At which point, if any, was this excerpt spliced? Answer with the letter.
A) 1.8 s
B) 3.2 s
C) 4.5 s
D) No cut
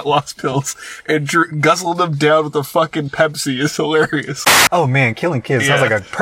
C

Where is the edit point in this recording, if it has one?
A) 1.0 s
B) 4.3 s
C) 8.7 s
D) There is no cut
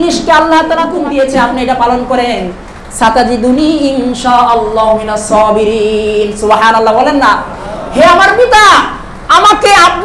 A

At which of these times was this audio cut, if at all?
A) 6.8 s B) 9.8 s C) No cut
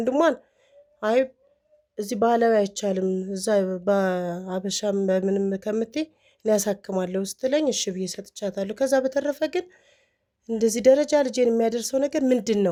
C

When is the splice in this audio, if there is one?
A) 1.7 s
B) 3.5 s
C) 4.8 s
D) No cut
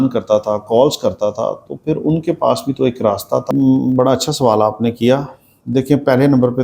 B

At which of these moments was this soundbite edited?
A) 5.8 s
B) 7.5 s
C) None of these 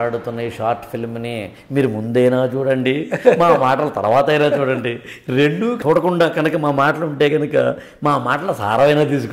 A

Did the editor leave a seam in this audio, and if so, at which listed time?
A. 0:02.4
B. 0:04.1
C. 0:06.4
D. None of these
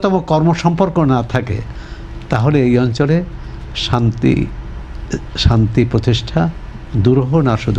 D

